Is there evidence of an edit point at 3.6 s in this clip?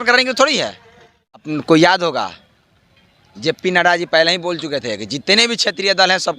no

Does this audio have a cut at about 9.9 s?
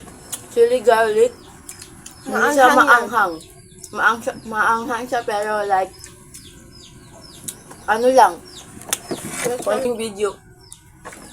yes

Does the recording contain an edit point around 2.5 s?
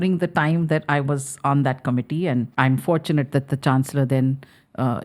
yes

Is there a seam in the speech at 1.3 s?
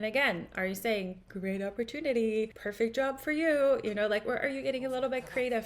no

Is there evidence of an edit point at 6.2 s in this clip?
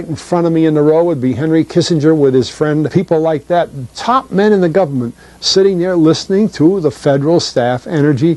no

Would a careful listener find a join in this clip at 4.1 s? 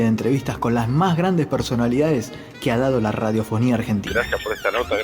yes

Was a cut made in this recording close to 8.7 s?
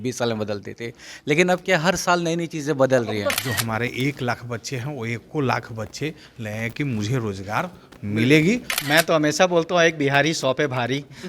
yes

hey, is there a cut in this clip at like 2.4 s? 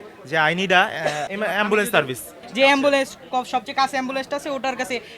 yes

